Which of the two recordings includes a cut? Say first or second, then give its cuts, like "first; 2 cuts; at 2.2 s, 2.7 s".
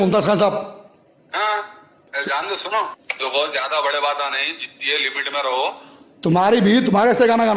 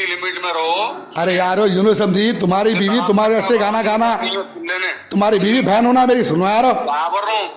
first; 1 cut; at 3.0 s